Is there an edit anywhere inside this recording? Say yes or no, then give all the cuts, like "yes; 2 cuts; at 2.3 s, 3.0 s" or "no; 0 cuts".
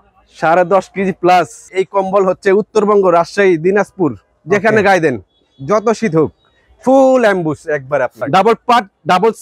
yes; 2 cuts; at 1.7 s, 8.2 s